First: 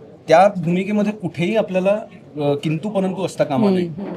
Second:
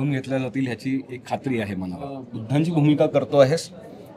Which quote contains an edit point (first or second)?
second